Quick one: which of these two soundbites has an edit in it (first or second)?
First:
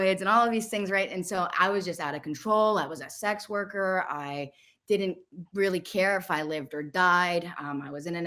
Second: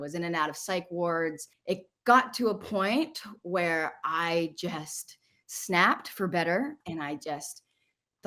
second